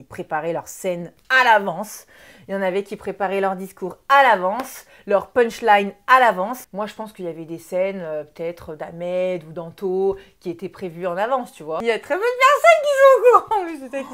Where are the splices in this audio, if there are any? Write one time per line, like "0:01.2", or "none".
0:06.6
0:11.8